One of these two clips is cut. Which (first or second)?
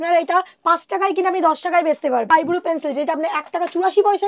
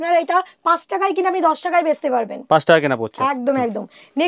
first